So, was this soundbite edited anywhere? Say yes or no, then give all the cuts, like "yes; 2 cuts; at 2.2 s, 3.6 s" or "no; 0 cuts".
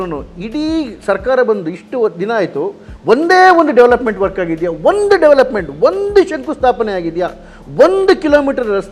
no; 0 cuts